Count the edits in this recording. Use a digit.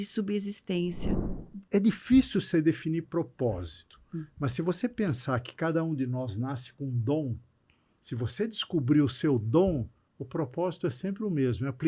1